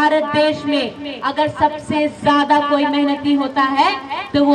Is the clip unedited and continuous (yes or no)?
yes